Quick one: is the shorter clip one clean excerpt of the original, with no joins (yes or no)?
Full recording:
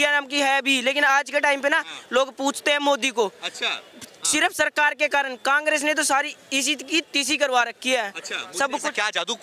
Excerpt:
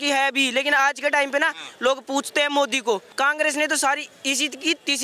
no